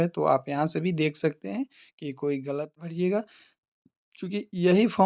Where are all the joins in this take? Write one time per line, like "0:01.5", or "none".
0:02.8